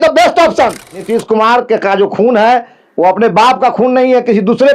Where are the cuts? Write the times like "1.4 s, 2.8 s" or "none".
1.0 s